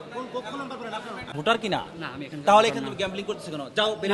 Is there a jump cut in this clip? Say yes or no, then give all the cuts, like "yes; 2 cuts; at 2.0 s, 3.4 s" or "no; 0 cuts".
yes; 1 cut; at 1.3 s